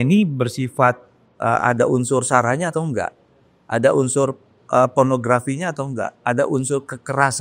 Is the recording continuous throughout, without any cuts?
yes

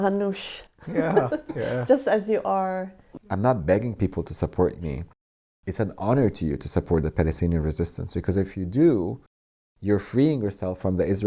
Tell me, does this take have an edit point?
yes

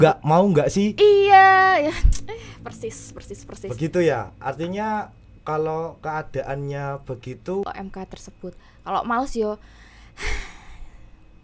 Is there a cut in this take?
yes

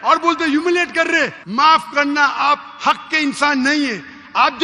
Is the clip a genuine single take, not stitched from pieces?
no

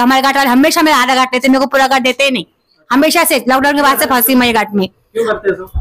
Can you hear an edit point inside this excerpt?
no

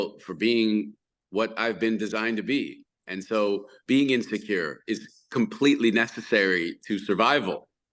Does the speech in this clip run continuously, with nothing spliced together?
yes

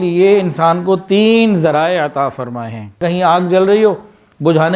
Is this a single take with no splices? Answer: no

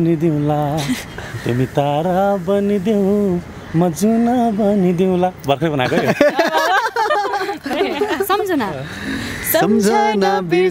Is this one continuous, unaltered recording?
no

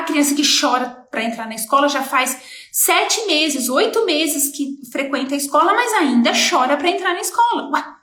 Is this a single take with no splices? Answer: yes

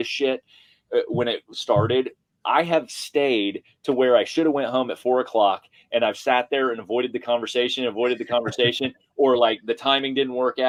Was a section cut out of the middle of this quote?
no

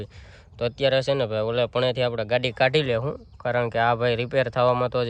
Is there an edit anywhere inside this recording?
no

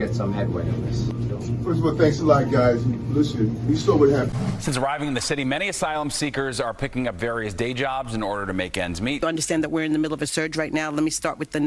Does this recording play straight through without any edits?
no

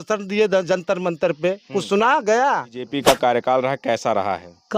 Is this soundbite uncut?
no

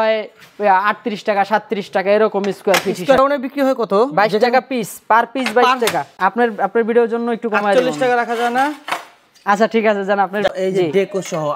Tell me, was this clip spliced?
yes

